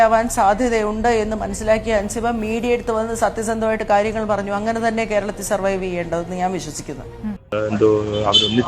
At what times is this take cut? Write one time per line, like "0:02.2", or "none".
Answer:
0:07.4